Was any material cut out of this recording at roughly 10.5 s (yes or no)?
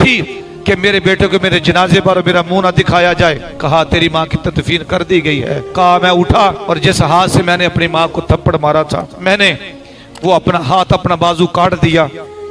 no